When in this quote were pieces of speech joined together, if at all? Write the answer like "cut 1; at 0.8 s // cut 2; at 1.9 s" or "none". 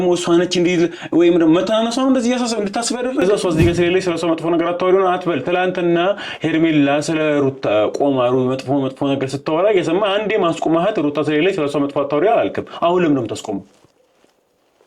cut 1; at 3.2 s